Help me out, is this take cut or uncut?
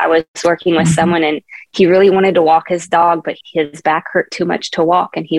uncut